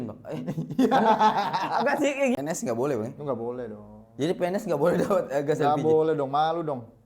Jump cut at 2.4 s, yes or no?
yes